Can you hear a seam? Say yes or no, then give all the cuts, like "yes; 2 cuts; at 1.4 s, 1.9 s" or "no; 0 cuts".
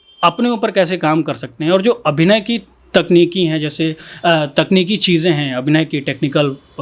no; 0 cuts